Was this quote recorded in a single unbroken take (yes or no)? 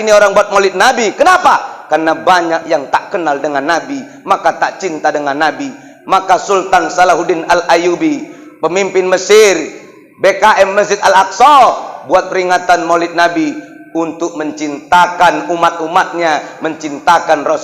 yes